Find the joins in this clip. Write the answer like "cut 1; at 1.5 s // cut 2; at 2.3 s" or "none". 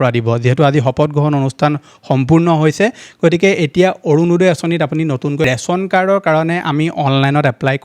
cut 1; at 5.4 s